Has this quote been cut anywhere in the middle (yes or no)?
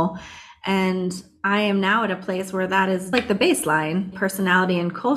yes